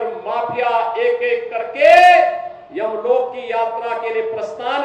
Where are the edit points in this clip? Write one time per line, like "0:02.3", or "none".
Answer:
none